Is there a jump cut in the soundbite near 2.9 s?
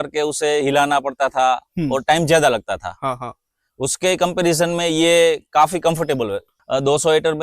no; 1 cut; at 6.5 s

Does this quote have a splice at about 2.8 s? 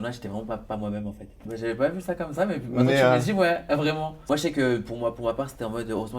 no; 2 cuts; at 1.4 s, 4.1 s

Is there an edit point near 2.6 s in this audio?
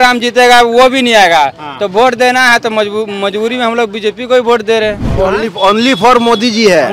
no; 1 cut; at 5.1 s

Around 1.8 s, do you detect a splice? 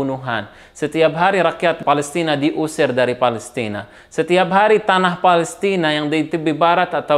yes; 1 cut; at 1.8 s

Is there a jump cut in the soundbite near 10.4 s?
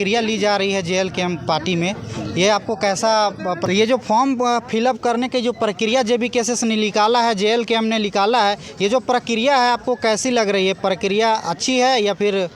no; 1 cut; at 3.6 s

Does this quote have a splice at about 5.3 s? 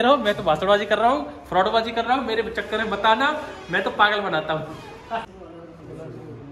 yes; 1 cut; at 5.3 s

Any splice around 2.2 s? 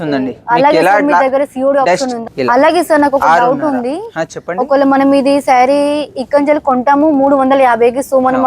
yes; 1 cut; at 2.2 s

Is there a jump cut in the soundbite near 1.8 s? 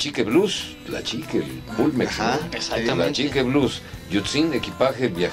yes; 1 cut; at 1.8 s

